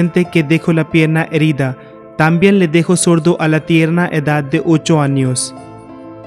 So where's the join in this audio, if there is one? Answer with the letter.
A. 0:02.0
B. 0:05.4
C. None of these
B